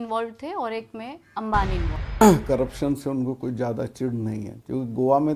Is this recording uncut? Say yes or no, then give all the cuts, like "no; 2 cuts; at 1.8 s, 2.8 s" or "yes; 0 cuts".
no; 1 cut; at 2.2 s